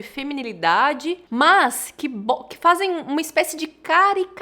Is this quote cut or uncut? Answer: cut